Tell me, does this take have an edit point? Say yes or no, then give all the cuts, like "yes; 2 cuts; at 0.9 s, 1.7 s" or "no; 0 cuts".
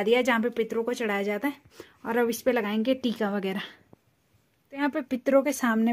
yes; 1 cut; at 4.8 s